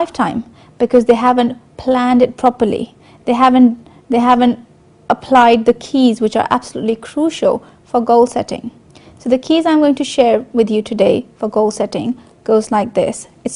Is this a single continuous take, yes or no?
no